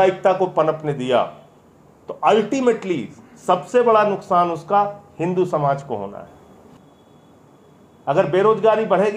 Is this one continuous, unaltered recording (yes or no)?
no